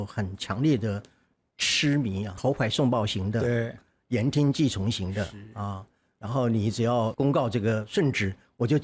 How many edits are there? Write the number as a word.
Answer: two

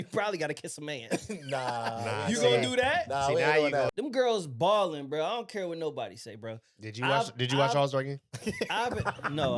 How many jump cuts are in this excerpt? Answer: one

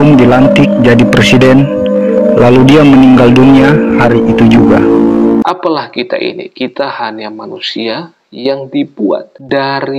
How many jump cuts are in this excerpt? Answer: one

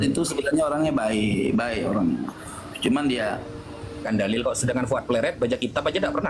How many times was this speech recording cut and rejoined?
one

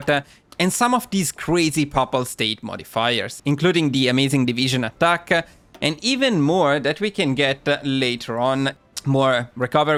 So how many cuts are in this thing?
zero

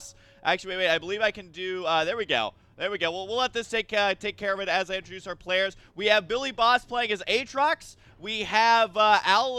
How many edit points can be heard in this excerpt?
one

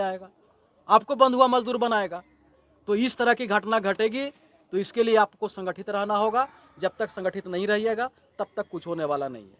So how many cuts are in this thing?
zero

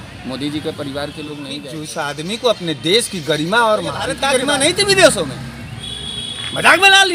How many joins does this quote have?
two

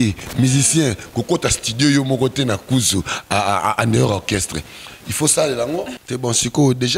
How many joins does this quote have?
one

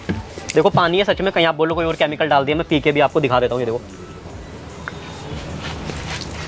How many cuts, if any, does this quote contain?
one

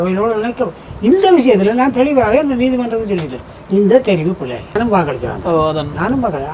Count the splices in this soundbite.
one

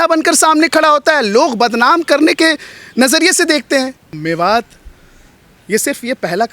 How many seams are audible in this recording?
one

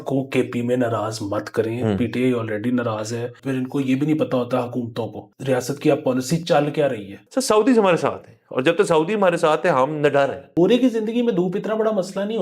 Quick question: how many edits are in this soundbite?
four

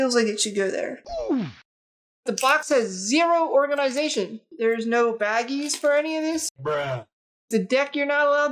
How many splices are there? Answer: three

